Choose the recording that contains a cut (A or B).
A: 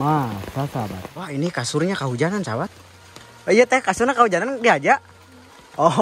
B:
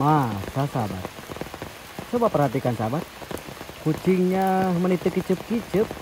A